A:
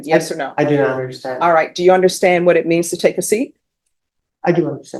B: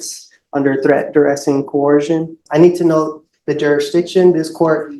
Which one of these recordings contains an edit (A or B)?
B